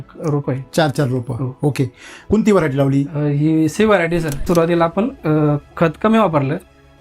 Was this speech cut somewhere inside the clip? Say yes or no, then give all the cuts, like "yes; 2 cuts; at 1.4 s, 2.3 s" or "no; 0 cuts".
yes; 2 cuts; at 2.2 s, 4.4 s